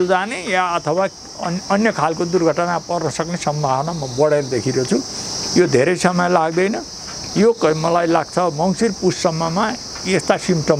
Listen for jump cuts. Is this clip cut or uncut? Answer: uncut